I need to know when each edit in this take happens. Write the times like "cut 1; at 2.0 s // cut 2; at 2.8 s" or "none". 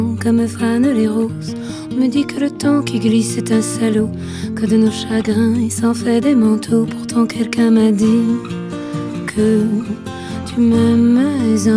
none